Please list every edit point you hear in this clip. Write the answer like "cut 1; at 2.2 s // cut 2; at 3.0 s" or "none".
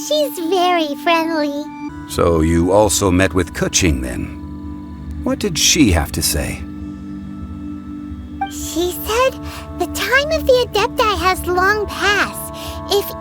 cut 1; at 1.8 s